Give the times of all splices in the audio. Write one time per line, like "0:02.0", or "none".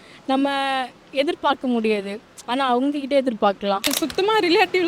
0:03.9